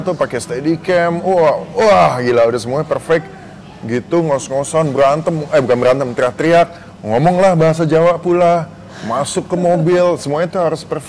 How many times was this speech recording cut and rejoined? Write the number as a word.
zero